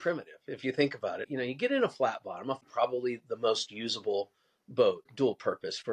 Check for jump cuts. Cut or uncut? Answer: cut